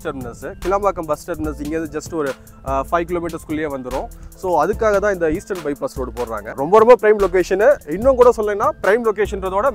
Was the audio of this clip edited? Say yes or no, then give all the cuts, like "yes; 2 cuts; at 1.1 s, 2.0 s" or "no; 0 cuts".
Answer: yes; 1 cut; at 6.5 s